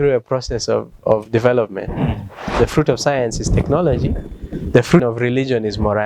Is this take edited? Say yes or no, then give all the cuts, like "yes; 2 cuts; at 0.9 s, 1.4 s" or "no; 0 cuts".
yes; 2 cuts; at 2.4 s, 5.0 s